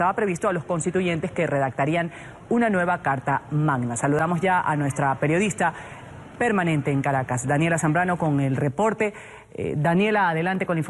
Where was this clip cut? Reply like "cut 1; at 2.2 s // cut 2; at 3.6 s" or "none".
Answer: none